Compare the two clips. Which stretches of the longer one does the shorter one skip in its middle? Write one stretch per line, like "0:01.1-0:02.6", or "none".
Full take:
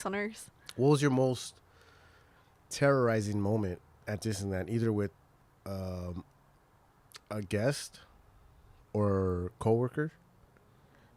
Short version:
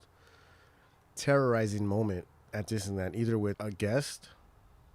0:05.1-0:07.3